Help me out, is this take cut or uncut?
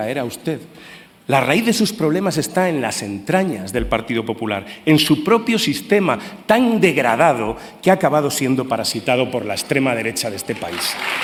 uncut